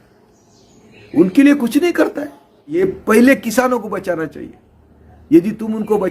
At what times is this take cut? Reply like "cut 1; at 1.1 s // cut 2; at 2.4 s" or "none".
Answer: cut 1; at 2.8 s